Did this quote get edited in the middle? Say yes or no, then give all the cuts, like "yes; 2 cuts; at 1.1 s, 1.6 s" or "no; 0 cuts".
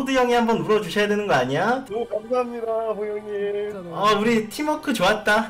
yes; 1 cut; at 1.9 s